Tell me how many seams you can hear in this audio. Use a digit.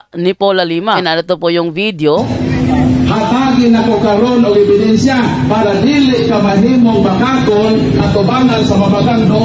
2